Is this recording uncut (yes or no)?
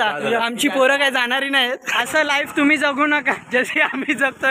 no